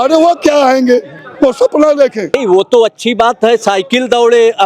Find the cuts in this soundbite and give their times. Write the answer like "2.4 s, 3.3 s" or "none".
2.3 s